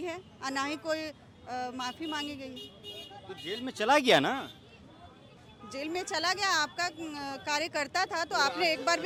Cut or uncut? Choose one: uncut